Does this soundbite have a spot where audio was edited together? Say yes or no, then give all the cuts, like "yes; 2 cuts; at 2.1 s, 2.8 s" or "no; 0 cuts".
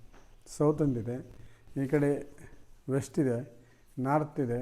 no; 0 cuts